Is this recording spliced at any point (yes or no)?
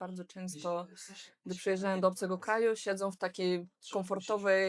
no